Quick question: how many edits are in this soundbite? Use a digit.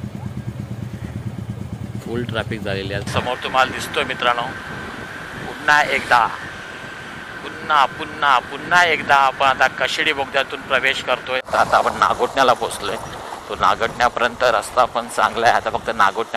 2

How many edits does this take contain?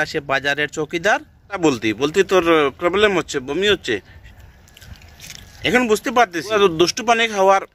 2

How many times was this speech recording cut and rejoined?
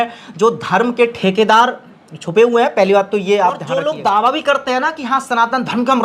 1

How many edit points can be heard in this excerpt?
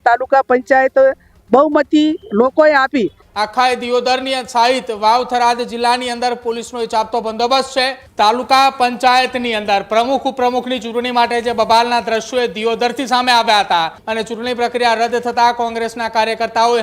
3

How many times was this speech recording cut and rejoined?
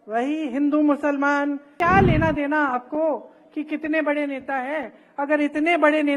1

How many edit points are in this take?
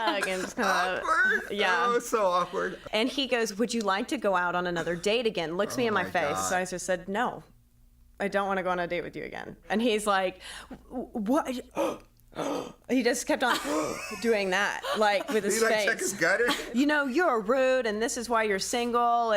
4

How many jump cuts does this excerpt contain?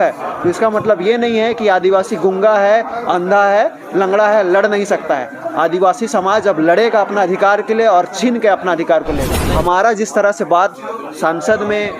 1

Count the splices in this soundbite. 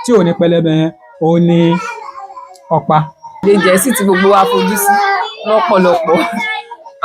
1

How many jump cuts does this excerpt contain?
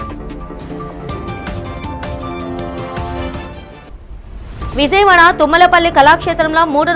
1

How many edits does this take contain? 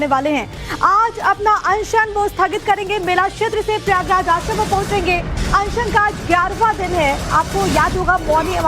1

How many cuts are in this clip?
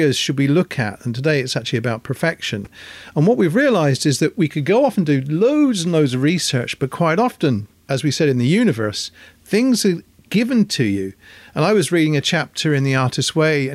0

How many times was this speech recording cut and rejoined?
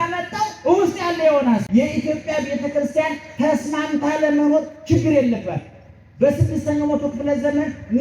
1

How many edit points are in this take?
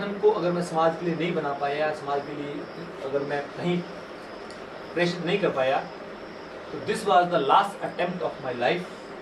0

